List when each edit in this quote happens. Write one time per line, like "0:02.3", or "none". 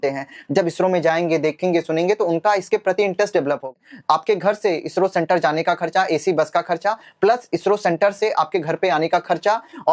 0:03.7